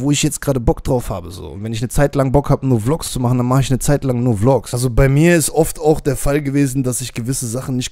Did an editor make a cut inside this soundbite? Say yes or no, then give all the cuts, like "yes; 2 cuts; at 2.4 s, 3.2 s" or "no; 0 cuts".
yes; 1 cut; at 4.7 s